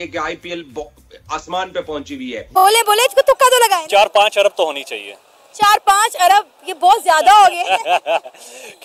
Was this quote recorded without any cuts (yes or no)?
no